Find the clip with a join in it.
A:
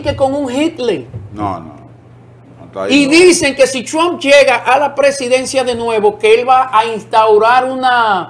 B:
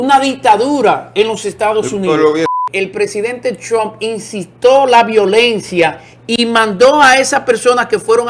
B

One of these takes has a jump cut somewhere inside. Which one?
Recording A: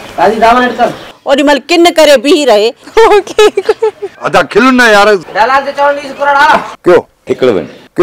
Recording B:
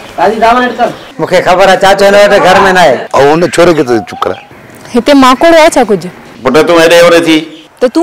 A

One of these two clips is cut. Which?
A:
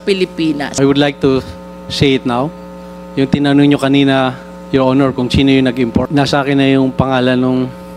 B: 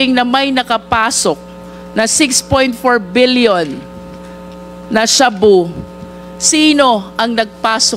A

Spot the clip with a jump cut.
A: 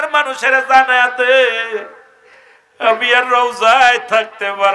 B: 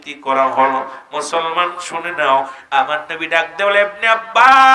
B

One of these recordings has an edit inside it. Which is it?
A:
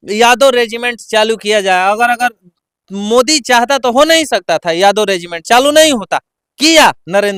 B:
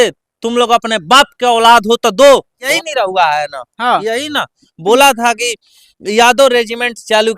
B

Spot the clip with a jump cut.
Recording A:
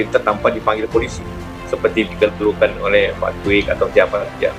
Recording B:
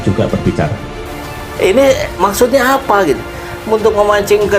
B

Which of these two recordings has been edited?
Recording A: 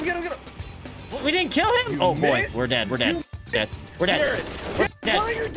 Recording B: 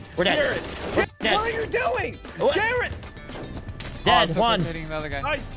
B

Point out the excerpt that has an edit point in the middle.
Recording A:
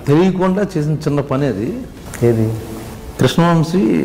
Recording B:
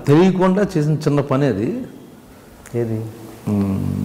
A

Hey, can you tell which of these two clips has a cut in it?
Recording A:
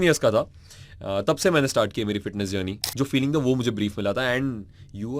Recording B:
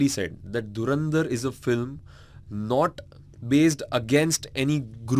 A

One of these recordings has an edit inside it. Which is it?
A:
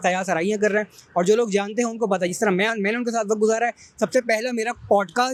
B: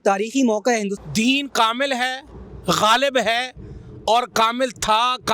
B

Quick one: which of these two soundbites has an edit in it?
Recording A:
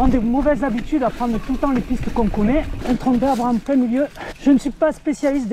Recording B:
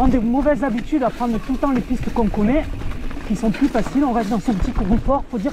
A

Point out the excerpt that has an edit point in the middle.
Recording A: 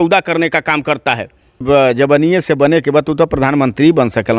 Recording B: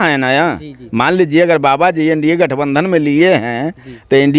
A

